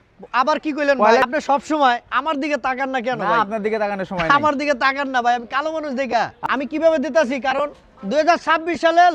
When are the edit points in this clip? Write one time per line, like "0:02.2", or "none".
0:01.2
0:06.4